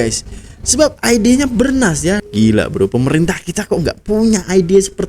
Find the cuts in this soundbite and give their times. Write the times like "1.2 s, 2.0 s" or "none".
2.2 s